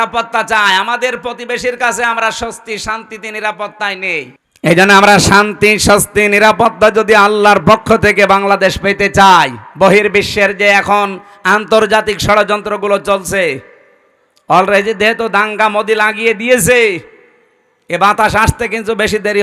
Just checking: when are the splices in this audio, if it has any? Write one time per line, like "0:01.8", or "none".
0:04.3